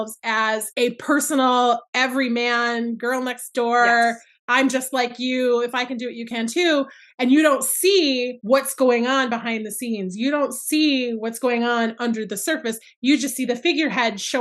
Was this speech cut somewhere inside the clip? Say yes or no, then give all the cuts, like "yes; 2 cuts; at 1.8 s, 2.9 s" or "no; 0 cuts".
no; 0 cuts